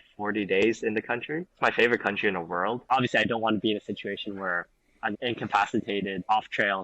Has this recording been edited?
yes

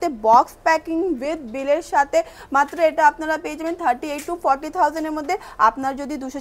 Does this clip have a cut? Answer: no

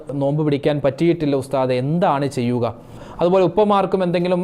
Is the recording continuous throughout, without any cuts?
no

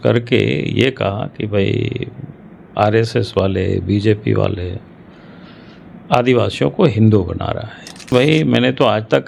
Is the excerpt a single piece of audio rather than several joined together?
no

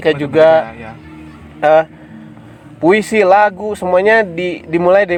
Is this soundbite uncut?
yes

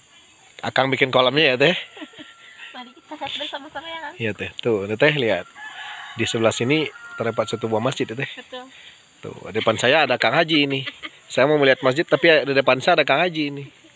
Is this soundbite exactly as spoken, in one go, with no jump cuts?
yes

